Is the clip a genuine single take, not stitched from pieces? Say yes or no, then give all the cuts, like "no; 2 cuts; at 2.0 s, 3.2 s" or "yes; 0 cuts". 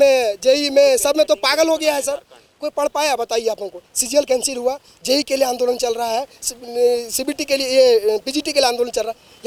yes; 0 cuts